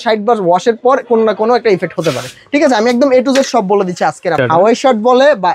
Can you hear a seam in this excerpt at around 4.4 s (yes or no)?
yes